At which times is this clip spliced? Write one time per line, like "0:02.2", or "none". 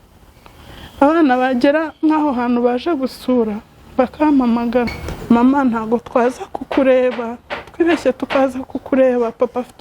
0:04.9